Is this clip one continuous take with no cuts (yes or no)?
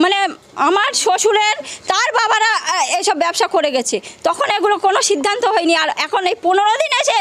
yes